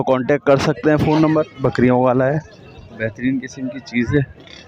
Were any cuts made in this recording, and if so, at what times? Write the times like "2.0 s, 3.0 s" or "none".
1.6 s